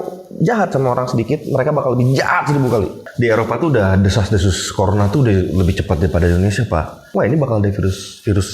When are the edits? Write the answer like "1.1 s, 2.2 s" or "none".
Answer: 3.0 s, 7.0 s